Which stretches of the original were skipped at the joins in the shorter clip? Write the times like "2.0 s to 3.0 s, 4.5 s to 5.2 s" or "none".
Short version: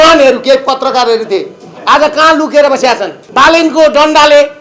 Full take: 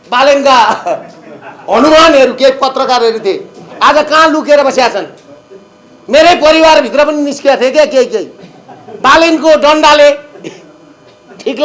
5.1 s to 8.8 s